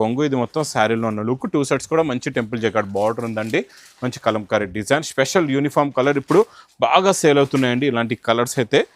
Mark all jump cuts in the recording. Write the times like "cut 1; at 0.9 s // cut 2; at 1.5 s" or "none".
none